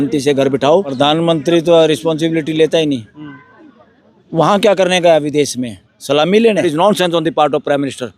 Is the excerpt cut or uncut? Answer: cut